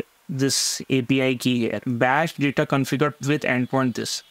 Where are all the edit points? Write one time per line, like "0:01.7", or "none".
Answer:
0:01.9
0:03.2